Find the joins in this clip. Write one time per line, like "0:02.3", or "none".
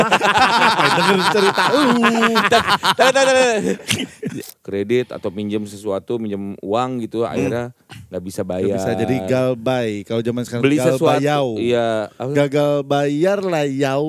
0:04.4